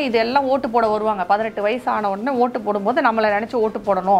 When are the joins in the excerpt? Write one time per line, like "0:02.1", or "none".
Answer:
none